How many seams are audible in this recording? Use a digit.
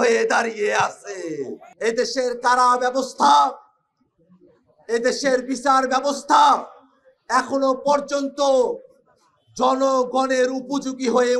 1